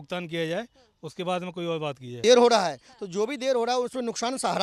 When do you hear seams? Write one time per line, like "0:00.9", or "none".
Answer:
0:02.2